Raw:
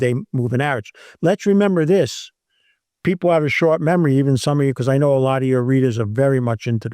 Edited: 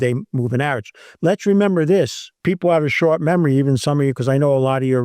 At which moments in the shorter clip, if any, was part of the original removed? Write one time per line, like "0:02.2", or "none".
0:02.3